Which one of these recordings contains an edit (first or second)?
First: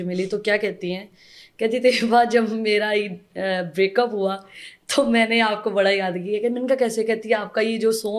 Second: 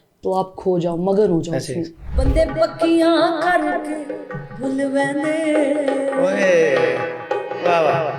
second